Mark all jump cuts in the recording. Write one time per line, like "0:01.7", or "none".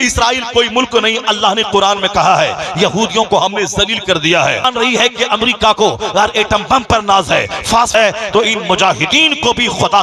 0:04.7
0:07.9